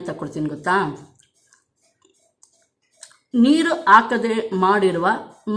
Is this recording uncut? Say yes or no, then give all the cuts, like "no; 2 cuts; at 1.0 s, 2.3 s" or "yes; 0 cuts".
yes; 0 cuts